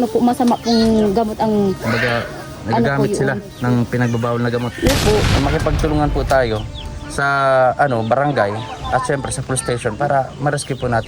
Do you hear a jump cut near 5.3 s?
yes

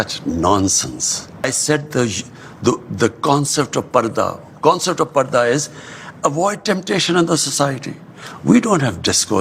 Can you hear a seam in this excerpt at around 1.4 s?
yes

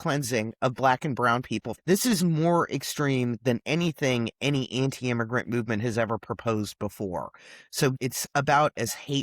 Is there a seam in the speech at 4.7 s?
no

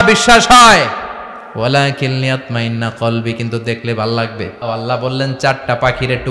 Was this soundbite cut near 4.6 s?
yes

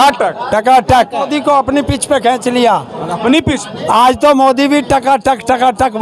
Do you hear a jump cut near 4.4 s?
no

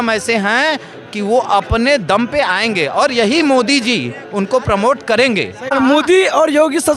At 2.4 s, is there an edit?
no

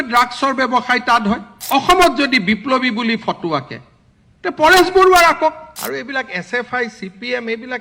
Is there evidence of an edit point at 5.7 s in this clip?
yes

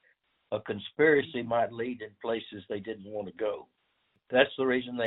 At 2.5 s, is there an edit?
no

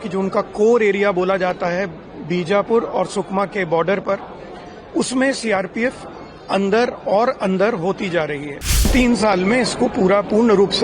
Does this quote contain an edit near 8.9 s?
yes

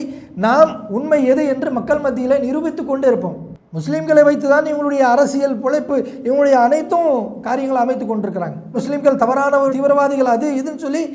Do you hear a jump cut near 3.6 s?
yes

